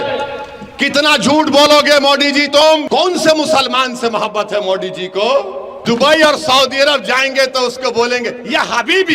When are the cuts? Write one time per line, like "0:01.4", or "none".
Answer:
0:02.8
0:05.7